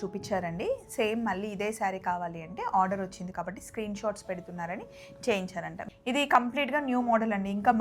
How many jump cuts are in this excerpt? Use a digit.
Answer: 1